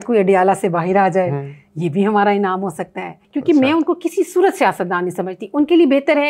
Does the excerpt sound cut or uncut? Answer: cut